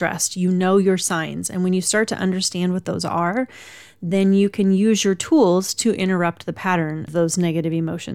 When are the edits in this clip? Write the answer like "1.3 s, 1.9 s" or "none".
7.1 s